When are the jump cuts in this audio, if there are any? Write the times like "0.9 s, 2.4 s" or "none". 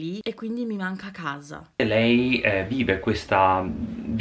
none